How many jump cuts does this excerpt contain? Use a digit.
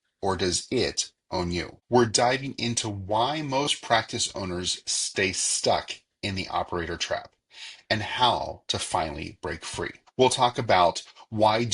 2